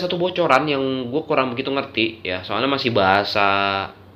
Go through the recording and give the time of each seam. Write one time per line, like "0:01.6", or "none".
0:02.1